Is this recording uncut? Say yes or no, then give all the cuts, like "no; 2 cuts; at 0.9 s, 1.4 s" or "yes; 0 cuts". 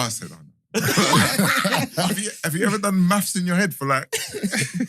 no; 1 cut; at 2.1 s